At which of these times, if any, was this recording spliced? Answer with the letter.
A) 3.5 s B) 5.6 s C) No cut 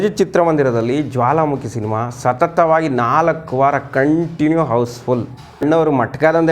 B